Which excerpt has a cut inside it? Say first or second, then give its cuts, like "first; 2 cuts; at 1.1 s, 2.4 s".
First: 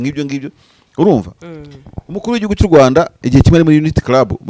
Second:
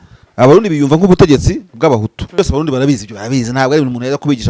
second; 1 cut; at 2.2 s